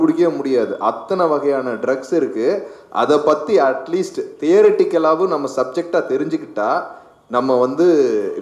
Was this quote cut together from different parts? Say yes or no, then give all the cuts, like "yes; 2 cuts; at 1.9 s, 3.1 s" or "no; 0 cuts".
no; 0 cuts